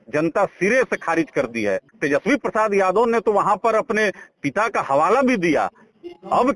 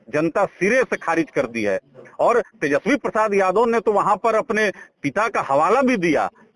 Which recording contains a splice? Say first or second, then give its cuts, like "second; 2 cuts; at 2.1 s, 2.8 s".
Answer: first; 1 cut; at 1.9 s